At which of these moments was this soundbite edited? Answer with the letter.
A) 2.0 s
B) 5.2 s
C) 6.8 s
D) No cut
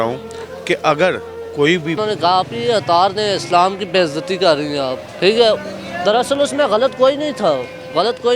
A